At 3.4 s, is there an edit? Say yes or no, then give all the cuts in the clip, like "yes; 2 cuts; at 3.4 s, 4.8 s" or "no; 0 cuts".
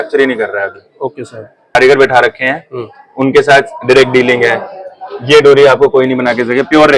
no; 1 cut; at 1.8 s